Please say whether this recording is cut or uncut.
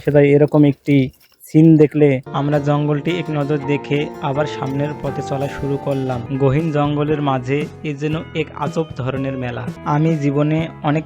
cut